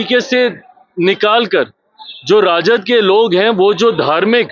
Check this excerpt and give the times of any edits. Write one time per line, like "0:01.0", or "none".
none